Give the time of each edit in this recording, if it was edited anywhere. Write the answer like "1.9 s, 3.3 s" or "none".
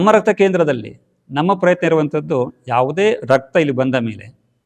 none